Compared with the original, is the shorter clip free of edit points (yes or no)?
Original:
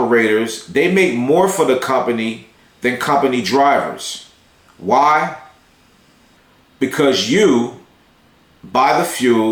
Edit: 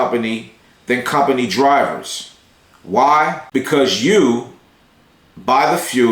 no